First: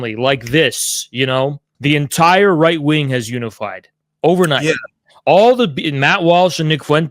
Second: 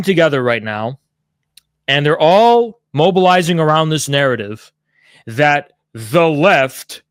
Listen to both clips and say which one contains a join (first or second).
first